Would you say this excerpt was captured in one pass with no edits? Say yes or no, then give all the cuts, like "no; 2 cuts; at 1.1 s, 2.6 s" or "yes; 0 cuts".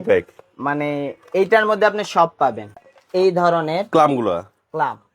no; 1 cut; at 2.7 s